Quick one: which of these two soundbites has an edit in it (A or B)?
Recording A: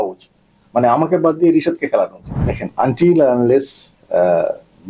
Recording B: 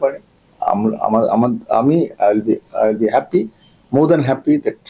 A